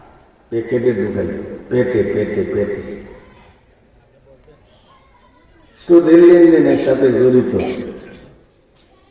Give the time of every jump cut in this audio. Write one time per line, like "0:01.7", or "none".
none